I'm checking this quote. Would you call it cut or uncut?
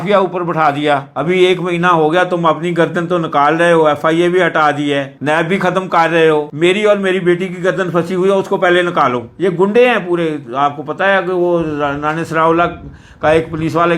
cut